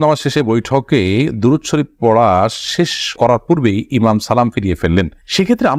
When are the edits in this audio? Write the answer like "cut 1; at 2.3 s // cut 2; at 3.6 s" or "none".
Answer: none